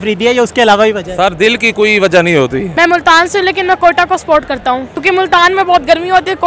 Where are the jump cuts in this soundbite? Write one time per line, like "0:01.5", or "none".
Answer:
0:02.7
0:05.0